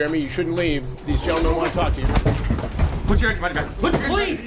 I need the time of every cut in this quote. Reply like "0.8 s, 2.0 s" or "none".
2.7 s